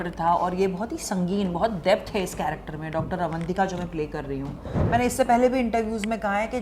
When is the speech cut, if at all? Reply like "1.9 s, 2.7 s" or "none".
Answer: 4.7 s

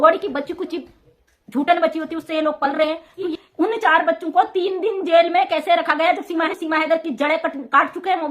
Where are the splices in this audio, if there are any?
3.2 s, 6.5 s

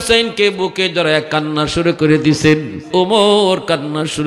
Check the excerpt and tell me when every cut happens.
2.8 s

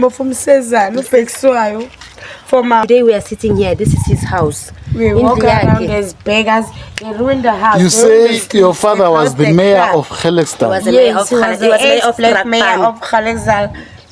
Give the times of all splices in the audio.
2.8 s

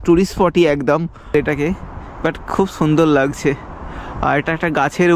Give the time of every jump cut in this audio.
1.3 s

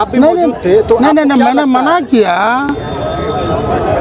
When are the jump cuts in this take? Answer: none

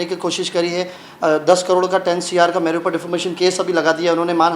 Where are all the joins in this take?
none

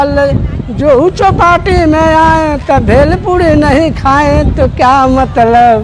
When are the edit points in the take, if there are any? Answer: none

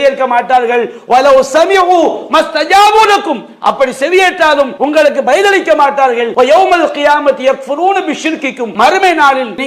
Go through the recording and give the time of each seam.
4.7 s, 6.3 s, 8.6 s

